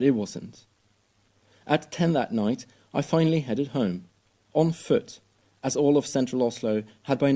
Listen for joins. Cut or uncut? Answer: uncut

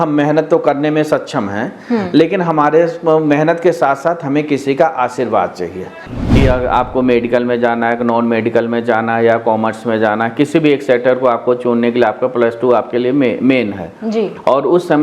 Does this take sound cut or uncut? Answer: cut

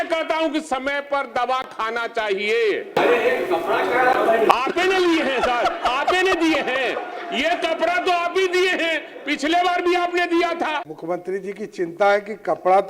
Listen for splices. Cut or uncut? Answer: cut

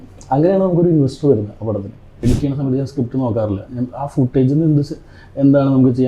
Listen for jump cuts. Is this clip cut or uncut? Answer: cut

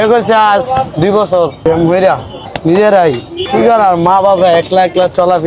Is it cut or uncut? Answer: cut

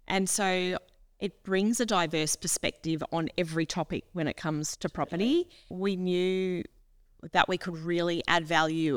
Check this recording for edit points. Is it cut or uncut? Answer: cut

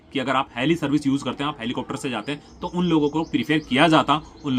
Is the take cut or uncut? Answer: uncut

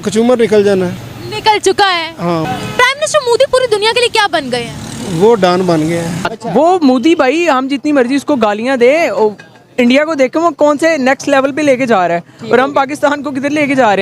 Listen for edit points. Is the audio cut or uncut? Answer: cut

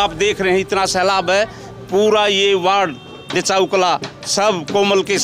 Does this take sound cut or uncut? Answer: uncut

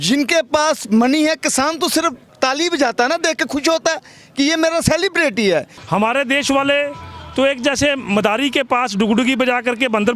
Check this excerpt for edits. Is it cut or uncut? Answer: cut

